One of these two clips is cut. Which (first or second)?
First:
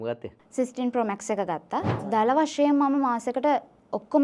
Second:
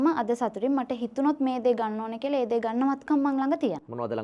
first